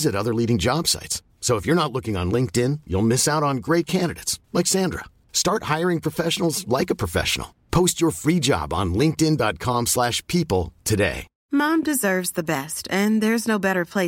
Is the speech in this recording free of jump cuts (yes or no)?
no